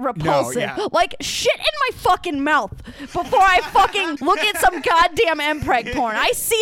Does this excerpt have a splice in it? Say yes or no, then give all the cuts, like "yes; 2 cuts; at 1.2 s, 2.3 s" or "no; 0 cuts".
yes; 1 cut; at 4.1 s